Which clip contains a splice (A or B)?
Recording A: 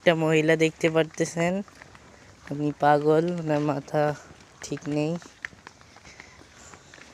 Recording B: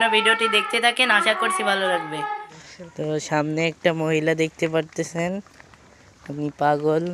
B